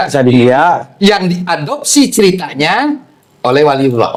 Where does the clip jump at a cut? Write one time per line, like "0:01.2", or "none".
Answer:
none